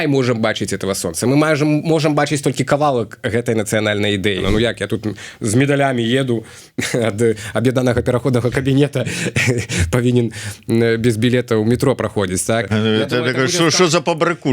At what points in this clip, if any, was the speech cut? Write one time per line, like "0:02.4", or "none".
0:04.4
0:12.7

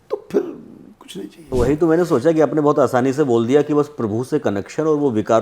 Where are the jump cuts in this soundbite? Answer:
0:01.4

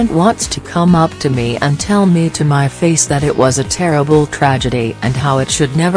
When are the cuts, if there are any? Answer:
none

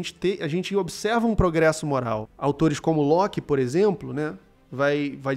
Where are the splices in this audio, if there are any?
0:02.3

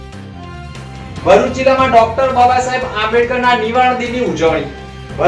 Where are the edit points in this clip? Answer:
0:00.9

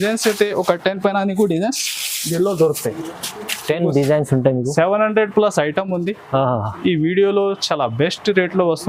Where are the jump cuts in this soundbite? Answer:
none

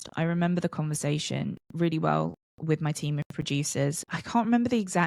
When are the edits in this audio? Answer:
0:04.1

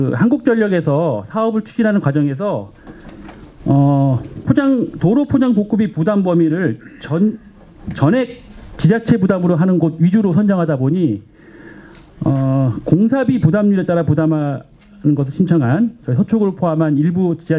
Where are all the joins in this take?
none

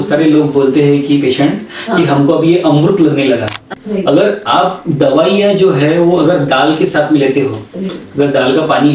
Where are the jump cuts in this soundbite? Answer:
0:03.7

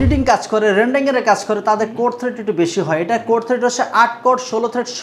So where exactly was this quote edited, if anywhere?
none

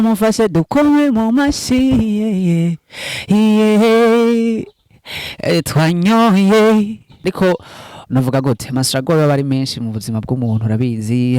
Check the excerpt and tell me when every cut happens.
0:07.2

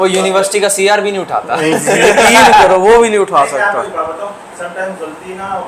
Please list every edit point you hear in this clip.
none

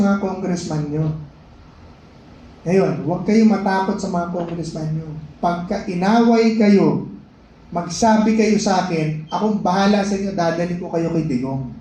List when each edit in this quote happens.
none

